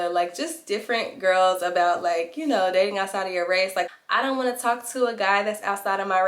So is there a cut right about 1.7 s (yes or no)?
no